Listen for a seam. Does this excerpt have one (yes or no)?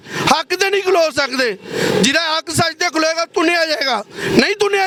no